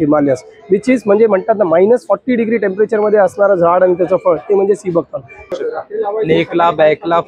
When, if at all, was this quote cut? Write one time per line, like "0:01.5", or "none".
0:05.5